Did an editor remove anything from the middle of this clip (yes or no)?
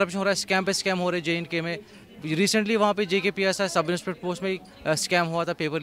no